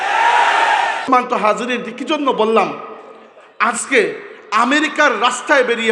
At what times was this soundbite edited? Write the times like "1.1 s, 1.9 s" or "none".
1.1 s

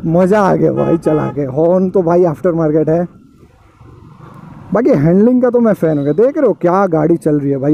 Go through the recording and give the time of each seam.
none

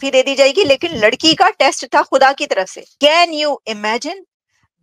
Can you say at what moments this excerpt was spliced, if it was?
2.8 s

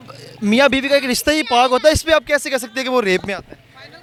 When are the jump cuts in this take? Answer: none

